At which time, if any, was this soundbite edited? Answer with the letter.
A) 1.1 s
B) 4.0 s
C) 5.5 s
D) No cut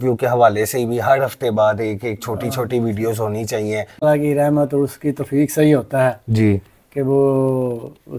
B